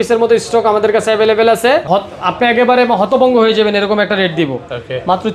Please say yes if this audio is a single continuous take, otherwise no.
no